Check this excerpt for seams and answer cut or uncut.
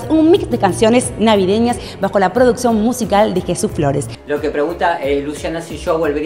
cut